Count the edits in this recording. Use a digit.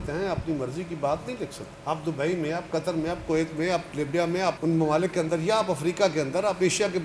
0